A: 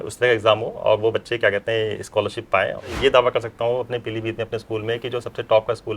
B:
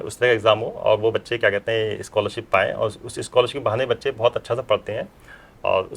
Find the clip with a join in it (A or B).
A